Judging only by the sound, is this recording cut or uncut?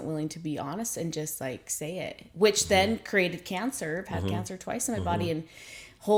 uncut